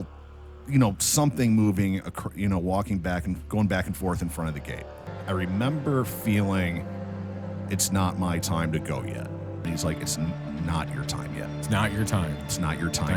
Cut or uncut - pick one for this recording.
cut